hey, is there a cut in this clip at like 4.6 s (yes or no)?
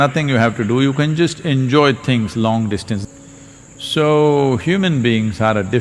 no